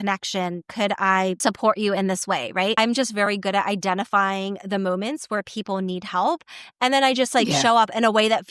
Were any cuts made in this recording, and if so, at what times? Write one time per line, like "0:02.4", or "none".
0:01.4
0:02.7

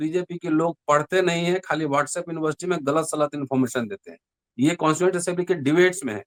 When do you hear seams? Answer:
none

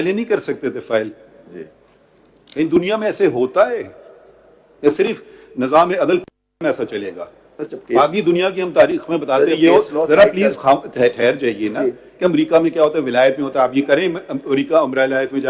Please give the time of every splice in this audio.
none

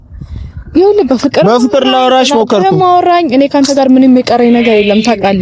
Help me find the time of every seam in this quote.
none

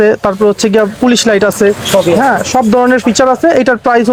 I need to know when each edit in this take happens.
none

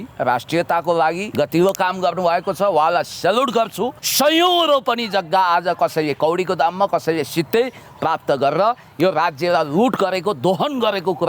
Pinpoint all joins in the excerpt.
0:01.2
0:04.0

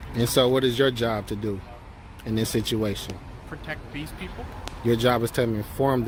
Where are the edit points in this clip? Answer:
none

